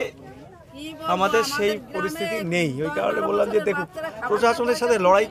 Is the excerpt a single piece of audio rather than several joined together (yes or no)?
yes